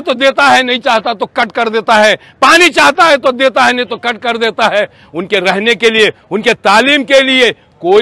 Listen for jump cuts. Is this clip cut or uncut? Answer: uncut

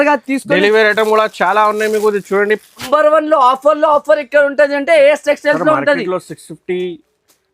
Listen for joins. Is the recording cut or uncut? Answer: cut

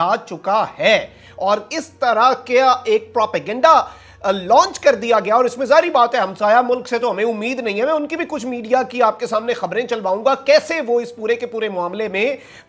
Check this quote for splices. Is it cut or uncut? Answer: uncut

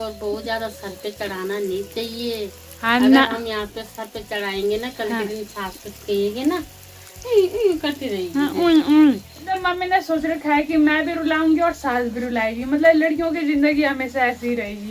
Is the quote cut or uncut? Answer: uncut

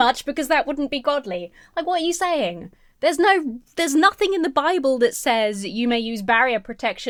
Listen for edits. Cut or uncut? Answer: uncut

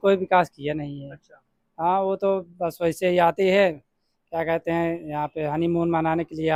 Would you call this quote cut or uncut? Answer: uncut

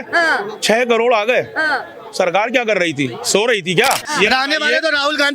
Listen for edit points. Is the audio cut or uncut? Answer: cut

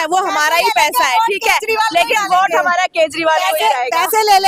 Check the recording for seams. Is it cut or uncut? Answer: uncut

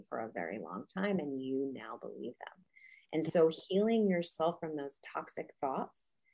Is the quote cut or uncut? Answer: uncut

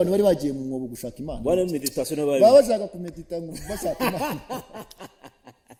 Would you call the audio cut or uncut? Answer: uncut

